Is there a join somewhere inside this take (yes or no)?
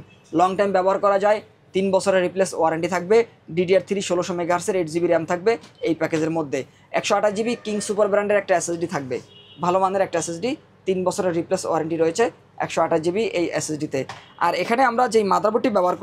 no